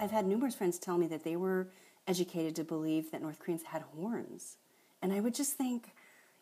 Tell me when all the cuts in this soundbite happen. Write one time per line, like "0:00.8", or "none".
none

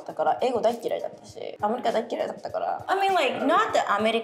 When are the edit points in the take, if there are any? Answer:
0:01.5
0:02.9

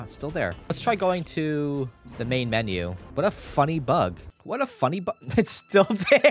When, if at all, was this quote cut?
0:00.7
0:02.0
0:03.0
0:04.3

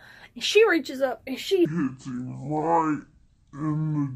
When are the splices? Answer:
0:01.6

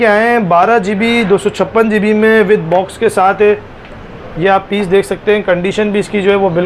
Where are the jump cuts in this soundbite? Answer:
none

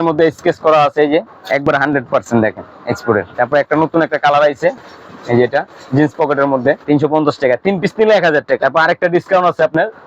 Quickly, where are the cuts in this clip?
0:01.4
0:03.3
0:06.8
0:08.6

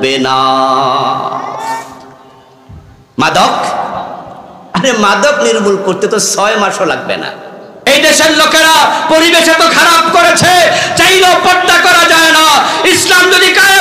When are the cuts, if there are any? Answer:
0:07.9

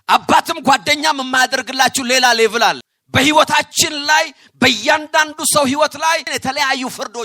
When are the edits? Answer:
0:02.9
0:06.3

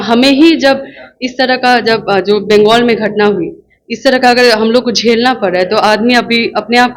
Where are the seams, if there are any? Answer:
none

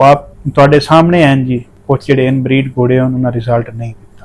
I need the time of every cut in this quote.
0:01.7

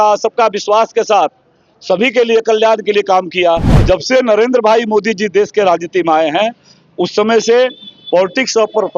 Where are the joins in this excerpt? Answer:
0:03.8

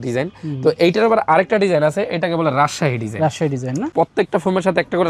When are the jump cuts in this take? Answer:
0:03.9

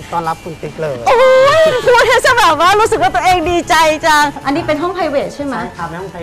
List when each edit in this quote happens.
0:04.4

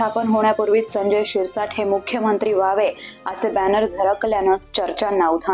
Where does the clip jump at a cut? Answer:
none

